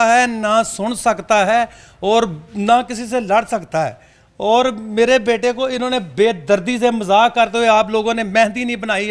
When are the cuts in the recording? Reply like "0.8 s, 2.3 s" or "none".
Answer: none